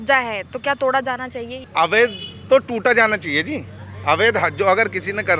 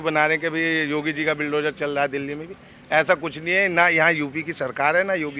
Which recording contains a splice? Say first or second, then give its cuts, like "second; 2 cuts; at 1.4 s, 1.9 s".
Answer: first; 1 cut; at 1.6 s